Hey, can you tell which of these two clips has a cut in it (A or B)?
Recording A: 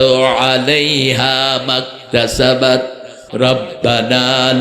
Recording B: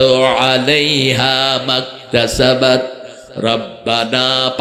A